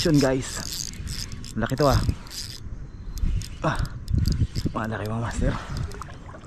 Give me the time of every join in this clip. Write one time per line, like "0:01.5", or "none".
none

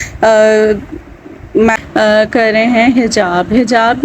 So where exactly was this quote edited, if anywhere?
0:01.8

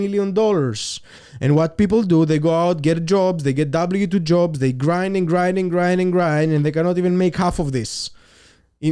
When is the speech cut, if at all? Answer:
0:01.2

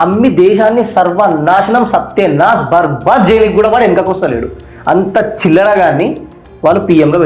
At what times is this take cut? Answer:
none

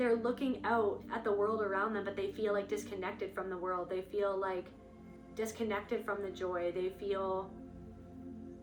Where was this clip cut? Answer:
none

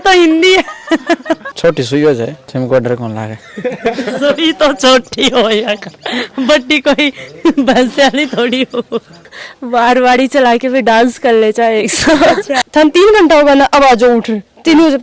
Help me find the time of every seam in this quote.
0:01.5
0:09.3
0:12.6

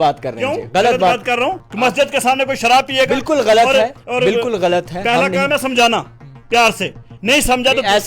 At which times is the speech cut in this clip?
0:01.6

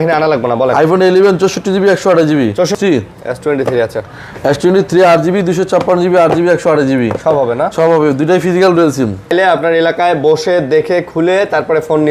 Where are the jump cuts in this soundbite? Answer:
0:02.7
0:09.3

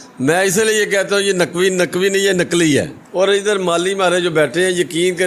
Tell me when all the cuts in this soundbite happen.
0:03.0

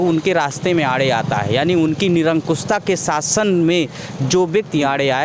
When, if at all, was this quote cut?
none

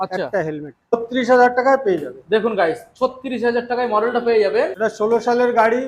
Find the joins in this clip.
0:00.9
0:04.7

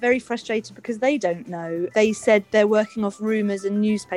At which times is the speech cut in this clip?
0:01.9

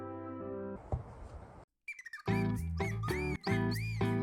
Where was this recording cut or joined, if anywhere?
0:00.8
0:02.1
0:03.3

